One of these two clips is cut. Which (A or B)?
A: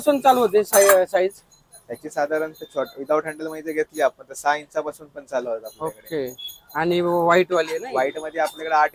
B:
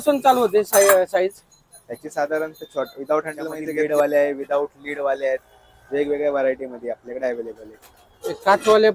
B